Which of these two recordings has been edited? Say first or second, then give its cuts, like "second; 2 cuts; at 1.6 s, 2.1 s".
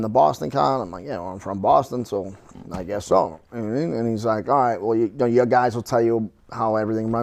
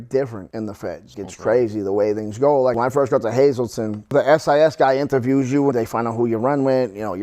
second; 4 cuts; at 1.0 s, 2.8 s, 4.1 s, 5.7 s